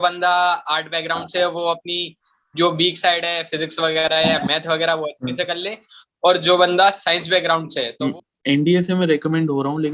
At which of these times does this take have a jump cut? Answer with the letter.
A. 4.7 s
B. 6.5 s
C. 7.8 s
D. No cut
C